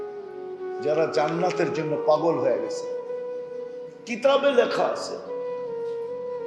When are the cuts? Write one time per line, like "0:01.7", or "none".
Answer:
0:02.6
0:04.1
0:05.6